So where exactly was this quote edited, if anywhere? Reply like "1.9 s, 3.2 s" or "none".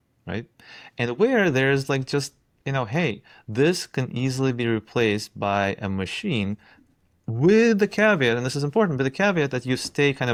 none